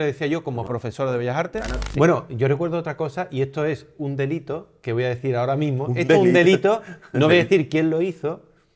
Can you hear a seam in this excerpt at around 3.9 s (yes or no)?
no